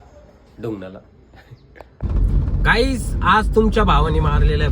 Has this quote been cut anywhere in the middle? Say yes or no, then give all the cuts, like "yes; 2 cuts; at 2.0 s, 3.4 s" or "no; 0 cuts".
yes; 1 cut; at 1.5 s